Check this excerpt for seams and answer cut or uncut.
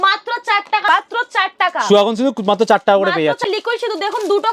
cut